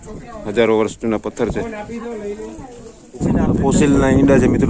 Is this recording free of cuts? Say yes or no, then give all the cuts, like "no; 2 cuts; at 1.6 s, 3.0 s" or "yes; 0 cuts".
no; 1 cut; at 3.2 s